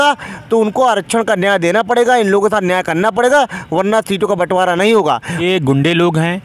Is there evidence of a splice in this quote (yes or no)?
yes